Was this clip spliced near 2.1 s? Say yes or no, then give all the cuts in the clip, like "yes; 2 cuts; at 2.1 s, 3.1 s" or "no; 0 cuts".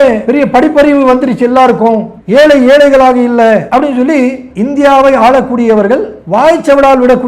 no; 1 cut; at 6.2 s